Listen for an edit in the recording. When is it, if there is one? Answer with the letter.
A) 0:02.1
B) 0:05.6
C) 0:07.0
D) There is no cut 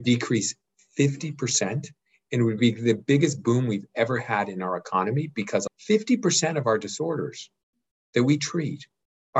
B